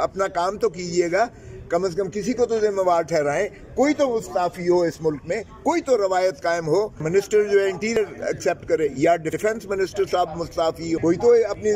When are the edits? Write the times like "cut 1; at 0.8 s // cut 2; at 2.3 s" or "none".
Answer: cut 1; at 7.0 s // cut 2; at 11.0 s